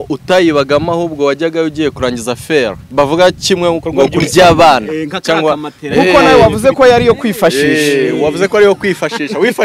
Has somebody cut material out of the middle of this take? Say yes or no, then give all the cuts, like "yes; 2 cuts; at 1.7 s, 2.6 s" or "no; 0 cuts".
no; 0 cuts